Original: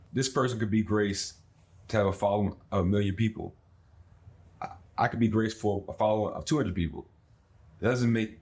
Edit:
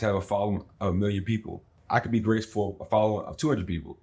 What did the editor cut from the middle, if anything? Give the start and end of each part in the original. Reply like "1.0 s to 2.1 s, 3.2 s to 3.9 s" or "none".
3.6 s to 4.8 s